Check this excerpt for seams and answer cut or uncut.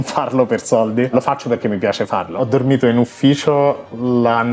cut